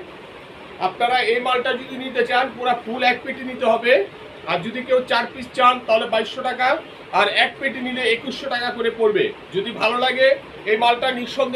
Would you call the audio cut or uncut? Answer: uncut